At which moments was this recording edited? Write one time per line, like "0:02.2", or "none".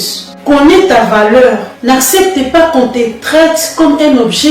0:01.7